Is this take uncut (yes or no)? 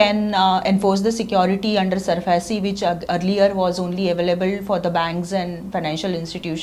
yes